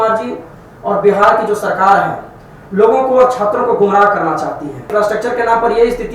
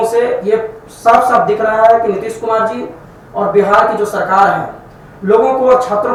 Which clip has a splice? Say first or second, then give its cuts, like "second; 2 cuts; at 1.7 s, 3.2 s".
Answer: first; 1 cut; at 4.9 s